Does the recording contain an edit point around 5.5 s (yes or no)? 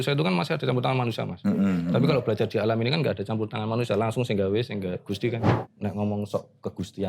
yes